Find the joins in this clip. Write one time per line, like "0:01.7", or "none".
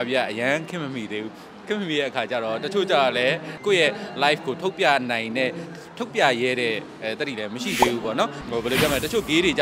0:03.5
0:08.4